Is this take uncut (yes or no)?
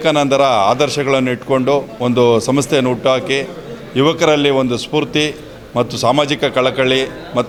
yes